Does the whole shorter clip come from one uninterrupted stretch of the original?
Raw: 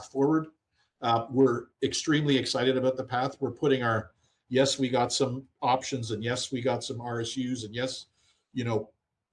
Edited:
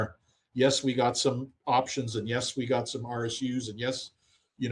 yes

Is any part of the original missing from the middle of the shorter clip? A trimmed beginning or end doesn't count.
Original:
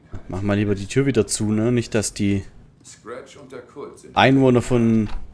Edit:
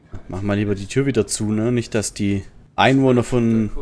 yes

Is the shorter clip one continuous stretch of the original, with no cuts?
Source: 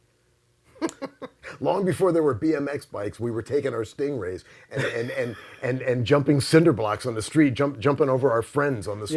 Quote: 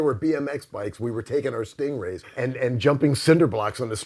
no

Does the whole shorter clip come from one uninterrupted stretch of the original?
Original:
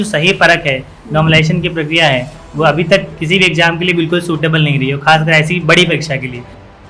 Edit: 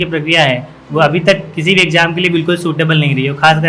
yes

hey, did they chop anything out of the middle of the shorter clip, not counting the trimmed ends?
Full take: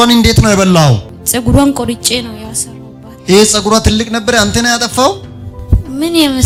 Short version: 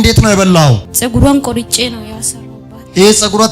yes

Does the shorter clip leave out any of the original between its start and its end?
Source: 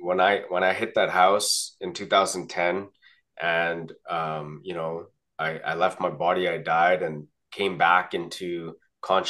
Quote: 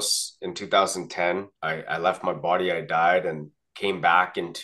yes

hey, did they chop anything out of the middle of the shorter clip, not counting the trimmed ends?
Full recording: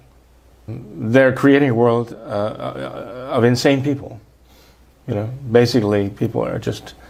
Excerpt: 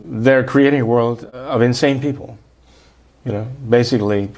yes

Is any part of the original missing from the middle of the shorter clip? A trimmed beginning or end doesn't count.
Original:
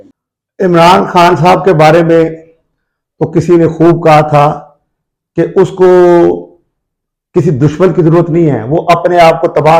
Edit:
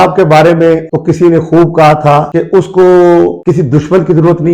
yes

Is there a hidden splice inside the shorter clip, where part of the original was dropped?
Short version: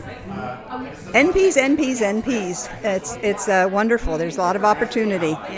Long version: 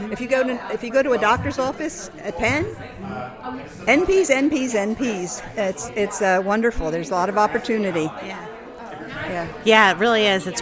no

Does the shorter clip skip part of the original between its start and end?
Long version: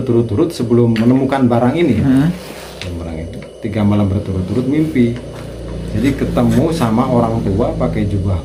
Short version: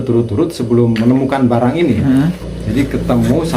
yes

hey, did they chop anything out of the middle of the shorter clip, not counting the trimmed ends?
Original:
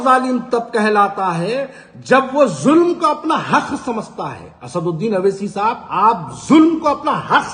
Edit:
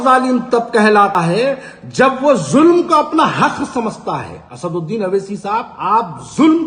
yes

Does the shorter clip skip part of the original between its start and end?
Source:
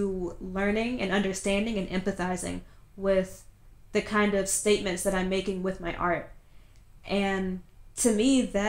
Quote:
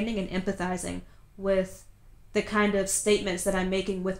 no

